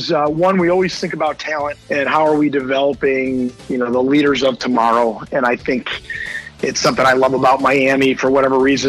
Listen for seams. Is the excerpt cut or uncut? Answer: cut